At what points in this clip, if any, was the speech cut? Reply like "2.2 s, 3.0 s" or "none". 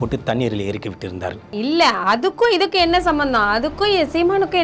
1.6 s